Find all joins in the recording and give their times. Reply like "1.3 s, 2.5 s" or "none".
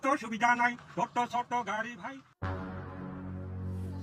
2.2 s